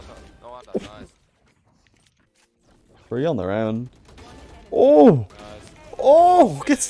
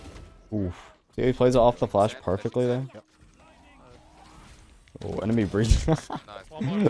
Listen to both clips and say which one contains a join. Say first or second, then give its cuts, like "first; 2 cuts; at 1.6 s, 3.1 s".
first; 1 cut; at 2.3 s